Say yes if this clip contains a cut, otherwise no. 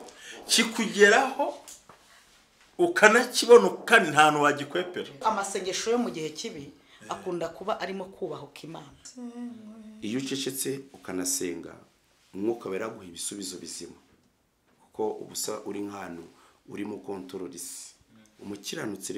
yes